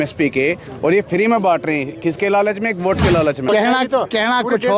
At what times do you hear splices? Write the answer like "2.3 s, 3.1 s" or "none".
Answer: 3.5 s

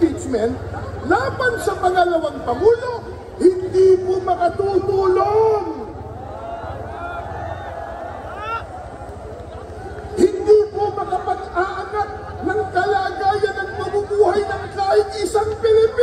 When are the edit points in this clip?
none

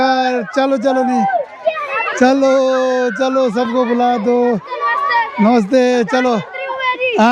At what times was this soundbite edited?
none

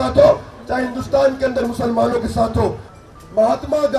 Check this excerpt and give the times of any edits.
2.9 s

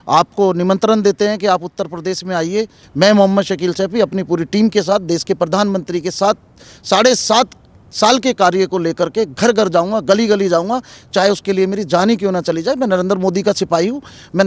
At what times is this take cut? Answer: 2.8 s

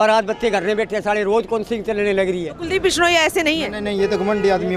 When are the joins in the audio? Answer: 2.5 s

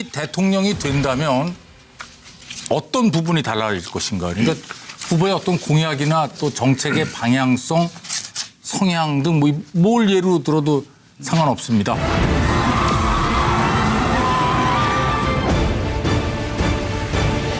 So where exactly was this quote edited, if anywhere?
15.7 s

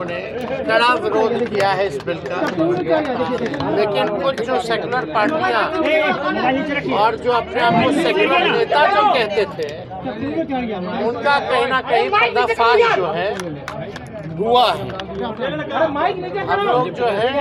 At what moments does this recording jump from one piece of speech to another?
none

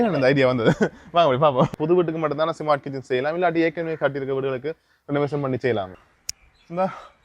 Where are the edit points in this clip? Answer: 1.7 s, 5.9 s

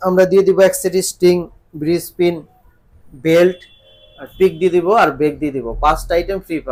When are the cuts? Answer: none

